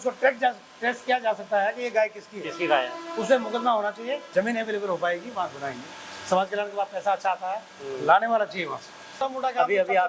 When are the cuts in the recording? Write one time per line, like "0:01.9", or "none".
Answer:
0:04.2
0:09.2